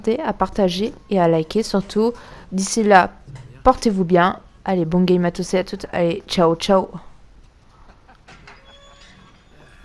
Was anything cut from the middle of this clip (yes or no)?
no